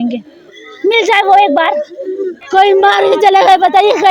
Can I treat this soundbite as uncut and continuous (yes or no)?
no